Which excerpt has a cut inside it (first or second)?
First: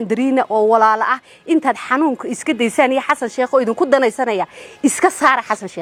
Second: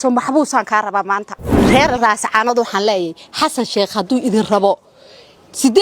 second